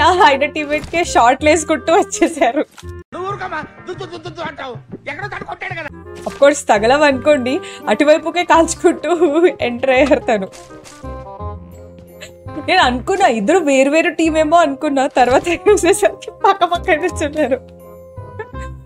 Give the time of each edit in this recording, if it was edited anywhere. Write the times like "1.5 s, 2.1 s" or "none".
none